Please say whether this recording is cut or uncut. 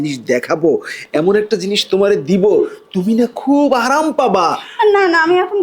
uncut